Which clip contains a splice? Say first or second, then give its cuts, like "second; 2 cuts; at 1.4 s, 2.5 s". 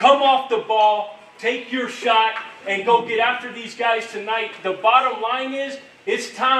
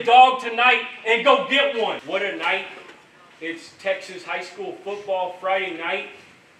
second; 1 cut; at 2.0 s